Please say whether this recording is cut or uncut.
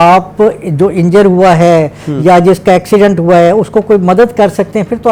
uncut